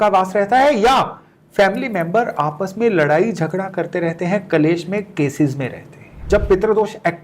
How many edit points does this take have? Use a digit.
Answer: 1